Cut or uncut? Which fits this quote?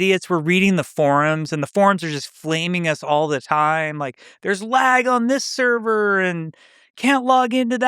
uncut